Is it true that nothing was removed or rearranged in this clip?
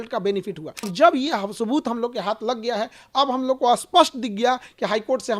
no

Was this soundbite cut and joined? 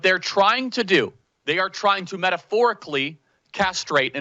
yes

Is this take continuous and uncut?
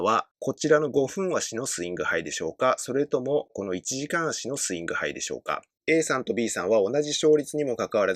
no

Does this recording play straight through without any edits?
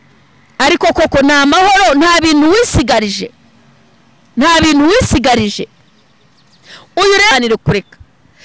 no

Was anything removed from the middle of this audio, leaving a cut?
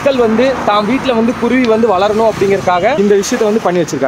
yes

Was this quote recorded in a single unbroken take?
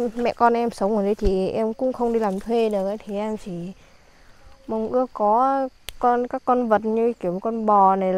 yes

